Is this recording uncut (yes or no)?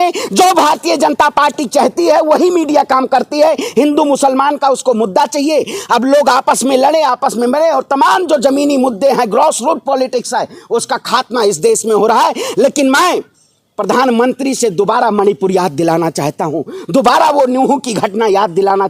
yes